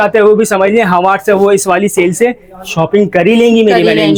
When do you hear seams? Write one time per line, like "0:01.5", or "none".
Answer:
none